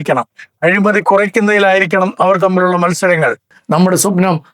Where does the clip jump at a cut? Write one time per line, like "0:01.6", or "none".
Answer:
0:03.5